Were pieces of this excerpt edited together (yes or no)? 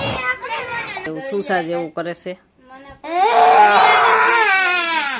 yes